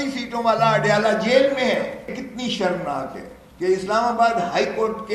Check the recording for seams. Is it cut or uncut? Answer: cut